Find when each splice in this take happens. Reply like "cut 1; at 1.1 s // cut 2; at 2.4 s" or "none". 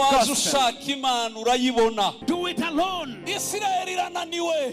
cut 1; at 2.2 s